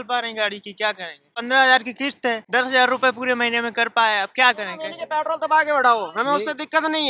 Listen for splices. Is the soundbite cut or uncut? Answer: cut